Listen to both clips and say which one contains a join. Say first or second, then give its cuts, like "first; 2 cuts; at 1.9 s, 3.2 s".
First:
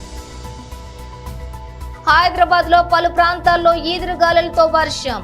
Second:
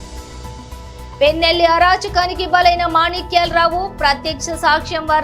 second; 1 cut; at 1.0 s